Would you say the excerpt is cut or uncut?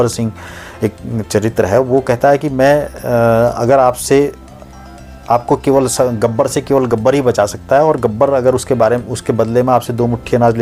uncut